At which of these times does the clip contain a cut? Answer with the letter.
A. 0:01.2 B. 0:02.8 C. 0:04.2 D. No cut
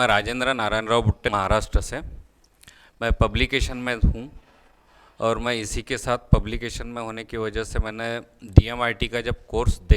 A